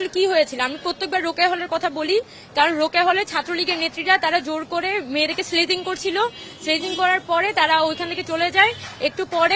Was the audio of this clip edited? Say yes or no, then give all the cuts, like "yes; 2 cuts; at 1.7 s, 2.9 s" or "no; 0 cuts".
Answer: no; 0 cuts